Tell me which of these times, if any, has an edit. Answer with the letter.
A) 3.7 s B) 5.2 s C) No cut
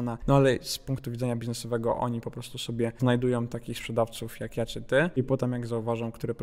B